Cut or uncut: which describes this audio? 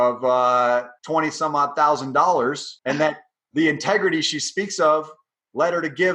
cut